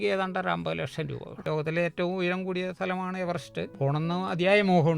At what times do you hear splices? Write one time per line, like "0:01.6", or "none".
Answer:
0:01.3
0:03.7